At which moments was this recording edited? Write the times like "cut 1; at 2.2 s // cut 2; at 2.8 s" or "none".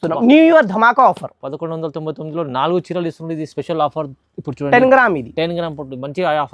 none